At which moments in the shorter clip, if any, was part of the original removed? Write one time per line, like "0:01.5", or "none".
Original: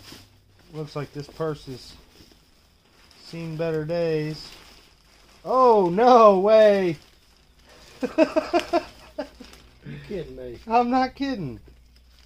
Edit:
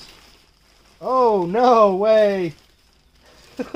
none